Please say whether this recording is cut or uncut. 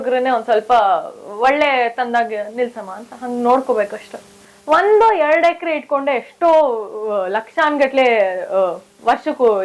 cut